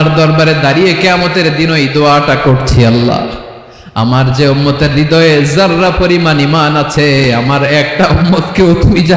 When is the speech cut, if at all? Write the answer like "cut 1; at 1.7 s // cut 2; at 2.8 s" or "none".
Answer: none